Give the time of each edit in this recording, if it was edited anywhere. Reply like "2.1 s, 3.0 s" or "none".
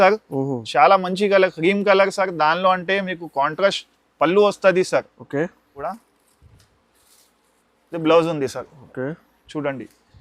5.9 s